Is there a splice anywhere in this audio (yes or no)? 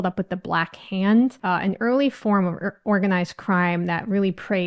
yes